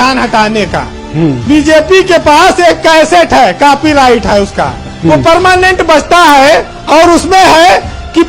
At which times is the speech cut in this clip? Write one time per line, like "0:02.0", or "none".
0:01.4